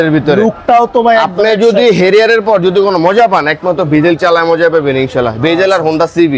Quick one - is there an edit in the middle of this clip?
no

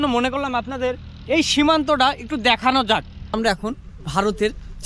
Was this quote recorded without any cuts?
no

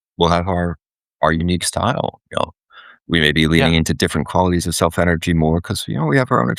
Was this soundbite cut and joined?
no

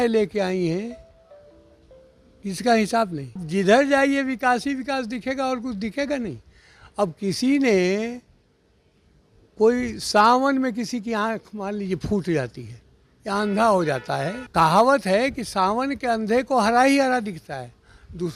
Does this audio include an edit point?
yes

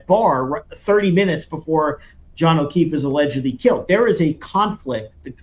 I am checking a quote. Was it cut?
no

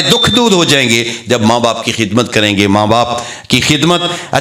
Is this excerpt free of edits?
yes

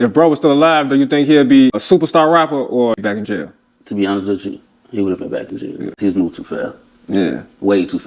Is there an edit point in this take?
yes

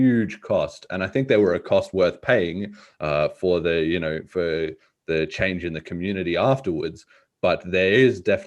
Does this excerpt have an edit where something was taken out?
no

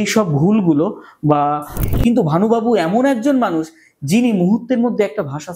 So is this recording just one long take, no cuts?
no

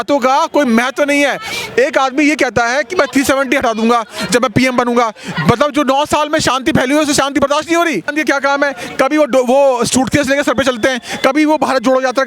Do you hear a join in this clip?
yes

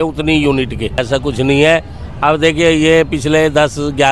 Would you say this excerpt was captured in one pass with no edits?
no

